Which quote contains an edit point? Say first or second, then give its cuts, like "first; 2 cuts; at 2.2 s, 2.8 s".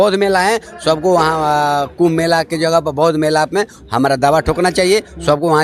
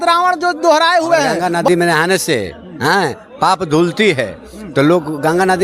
second; 1 cut; at 1.4 s